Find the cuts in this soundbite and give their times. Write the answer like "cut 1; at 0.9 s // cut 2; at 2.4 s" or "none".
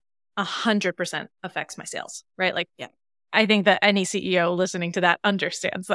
none